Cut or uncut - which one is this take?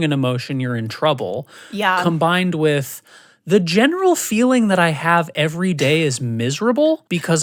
uncut